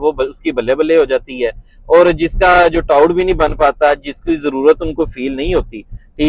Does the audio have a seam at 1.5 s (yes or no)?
no